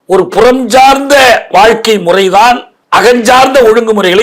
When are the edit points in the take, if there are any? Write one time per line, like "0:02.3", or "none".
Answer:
0:02.7